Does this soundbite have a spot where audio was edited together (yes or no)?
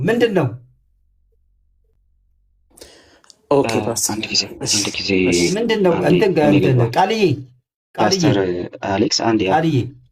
no